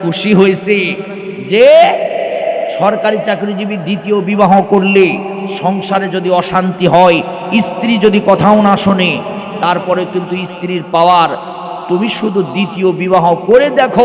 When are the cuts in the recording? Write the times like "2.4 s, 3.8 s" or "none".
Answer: none